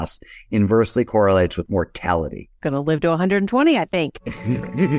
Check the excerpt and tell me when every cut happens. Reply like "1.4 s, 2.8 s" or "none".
none